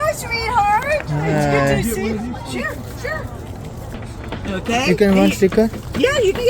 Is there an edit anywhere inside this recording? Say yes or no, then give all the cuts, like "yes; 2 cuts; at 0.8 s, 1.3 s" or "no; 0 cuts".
yes; 1 cut; at 4.0 s